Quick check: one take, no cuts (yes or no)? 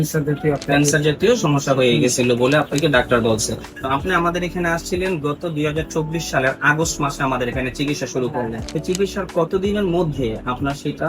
no